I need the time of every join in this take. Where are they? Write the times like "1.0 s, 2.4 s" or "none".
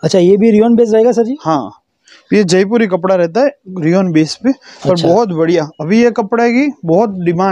none